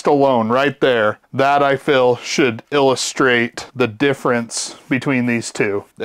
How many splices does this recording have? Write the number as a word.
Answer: one